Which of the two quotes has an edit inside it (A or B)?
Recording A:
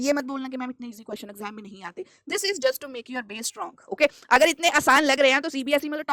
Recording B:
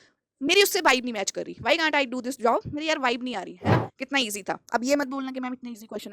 B